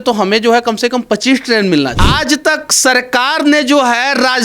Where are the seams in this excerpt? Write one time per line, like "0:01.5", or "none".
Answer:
0:02.0